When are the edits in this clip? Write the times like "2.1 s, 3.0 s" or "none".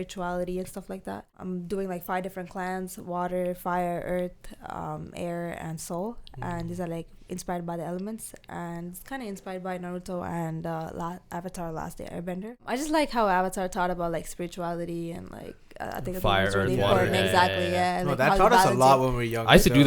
1.4 s, 12.6 s